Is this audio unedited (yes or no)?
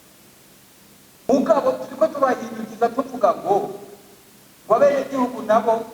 no